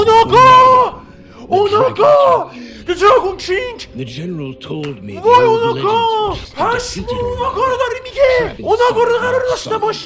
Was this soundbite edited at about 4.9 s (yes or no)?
no